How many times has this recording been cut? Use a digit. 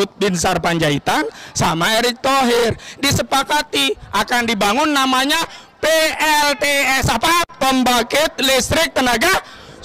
0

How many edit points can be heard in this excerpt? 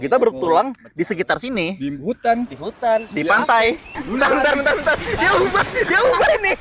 0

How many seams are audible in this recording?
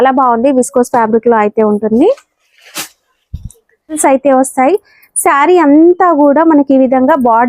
1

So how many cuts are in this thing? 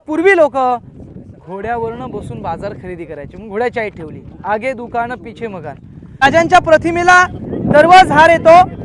1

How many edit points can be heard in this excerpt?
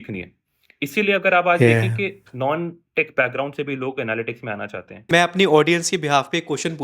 1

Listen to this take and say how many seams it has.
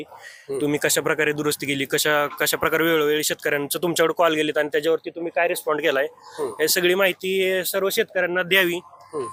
0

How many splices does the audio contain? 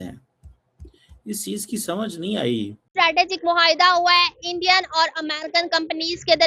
1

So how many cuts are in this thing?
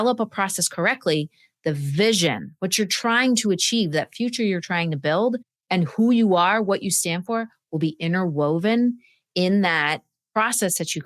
1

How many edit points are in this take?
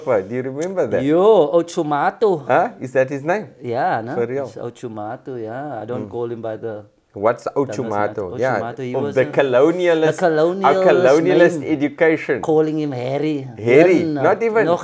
0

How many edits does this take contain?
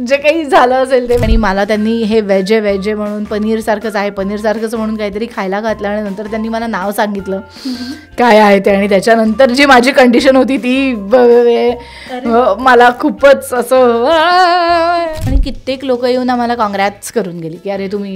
2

